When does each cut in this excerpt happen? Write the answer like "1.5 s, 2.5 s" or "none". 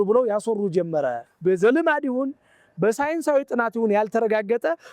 1.2 s